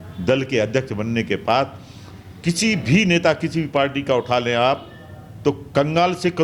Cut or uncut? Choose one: uncut